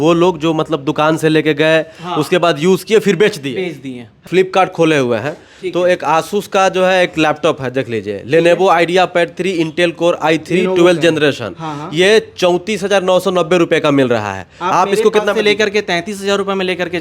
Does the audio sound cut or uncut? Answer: cut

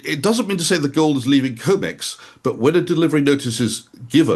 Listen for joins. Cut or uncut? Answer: uncut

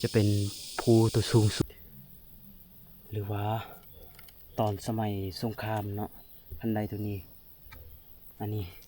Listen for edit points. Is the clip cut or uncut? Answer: cut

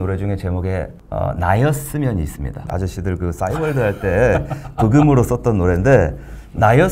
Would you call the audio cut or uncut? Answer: cut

